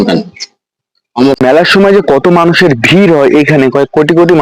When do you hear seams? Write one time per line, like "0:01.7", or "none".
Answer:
0:01.4

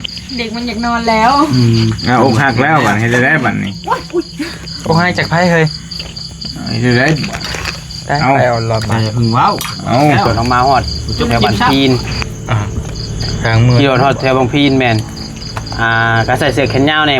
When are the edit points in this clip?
0:10.3

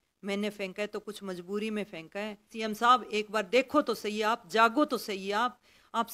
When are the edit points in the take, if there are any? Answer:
0:02.5

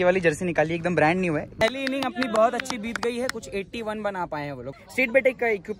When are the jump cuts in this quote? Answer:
0:01.6
0:04.8

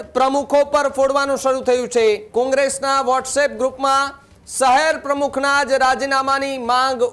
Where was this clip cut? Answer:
0:02.2

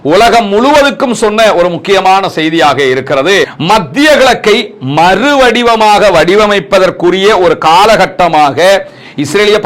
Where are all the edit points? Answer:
0:03.5

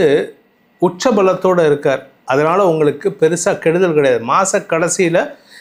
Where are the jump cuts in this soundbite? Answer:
none

